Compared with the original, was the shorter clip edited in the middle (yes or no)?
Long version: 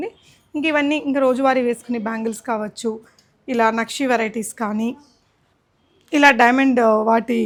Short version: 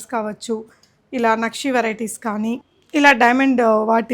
yes